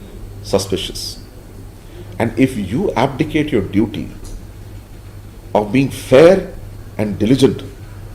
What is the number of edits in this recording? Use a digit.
0